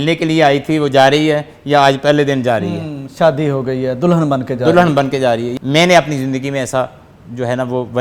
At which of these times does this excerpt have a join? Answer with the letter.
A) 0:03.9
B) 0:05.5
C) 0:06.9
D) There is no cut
B